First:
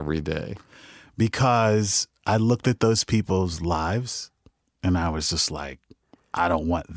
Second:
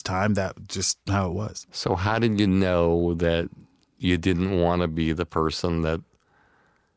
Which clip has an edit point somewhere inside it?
second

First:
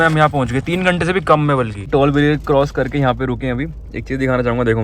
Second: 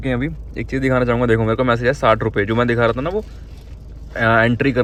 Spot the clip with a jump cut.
first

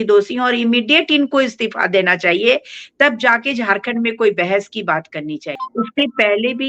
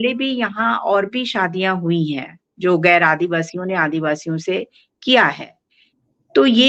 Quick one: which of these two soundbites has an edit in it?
first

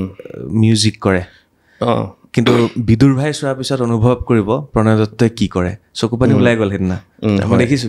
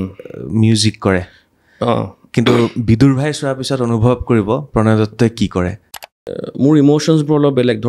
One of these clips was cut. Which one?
second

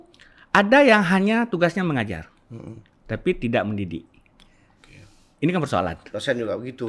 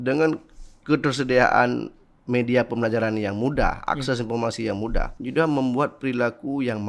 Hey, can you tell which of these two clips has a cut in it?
second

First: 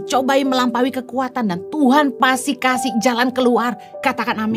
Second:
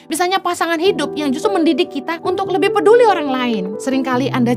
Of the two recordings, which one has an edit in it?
second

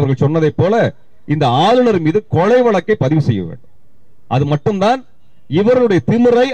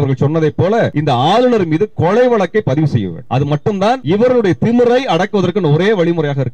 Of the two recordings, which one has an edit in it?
second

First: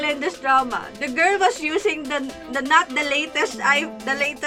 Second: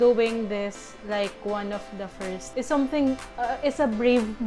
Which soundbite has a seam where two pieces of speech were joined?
second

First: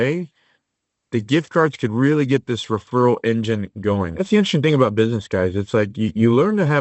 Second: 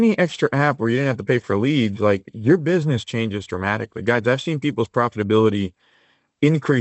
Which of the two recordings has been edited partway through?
first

